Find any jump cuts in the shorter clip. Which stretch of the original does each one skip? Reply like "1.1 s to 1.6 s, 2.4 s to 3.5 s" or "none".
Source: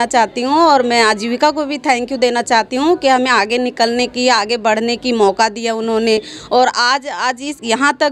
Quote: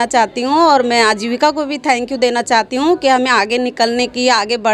none